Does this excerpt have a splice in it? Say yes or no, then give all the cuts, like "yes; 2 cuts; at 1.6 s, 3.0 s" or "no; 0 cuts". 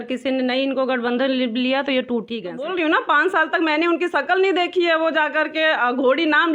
yes; 1 cut; at 2.7 s